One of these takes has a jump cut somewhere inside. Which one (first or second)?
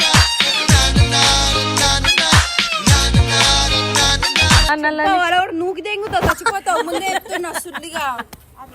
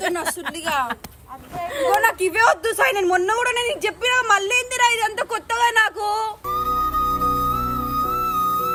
first